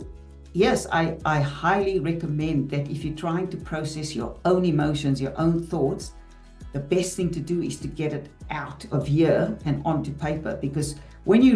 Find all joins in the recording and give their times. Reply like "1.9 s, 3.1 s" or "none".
none